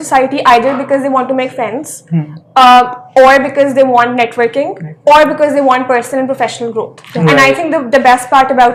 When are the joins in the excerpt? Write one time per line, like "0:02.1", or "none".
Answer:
none